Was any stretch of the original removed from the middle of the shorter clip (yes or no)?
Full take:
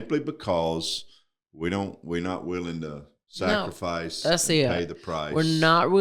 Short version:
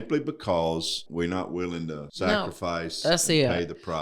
yes